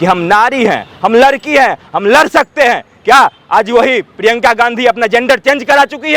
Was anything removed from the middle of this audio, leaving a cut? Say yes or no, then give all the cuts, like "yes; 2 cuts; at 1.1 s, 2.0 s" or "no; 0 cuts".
no; 0 cuts